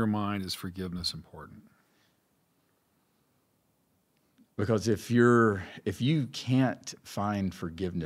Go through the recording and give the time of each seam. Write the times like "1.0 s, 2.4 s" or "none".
none